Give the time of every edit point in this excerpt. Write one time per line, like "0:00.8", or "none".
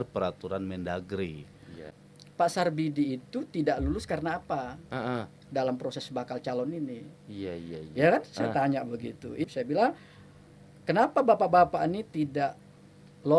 0:01.9
0:09.5